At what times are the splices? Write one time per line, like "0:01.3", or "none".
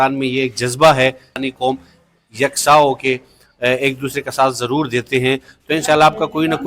0:01.4